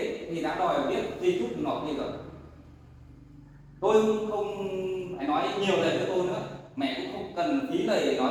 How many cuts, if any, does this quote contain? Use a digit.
0